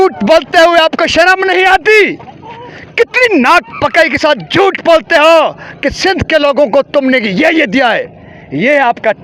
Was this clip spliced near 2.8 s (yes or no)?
no